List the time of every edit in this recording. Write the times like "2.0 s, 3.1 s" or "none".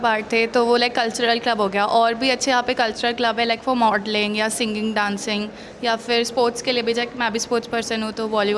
none